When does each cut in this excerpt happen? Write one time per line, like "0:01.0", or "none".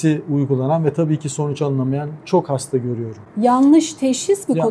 none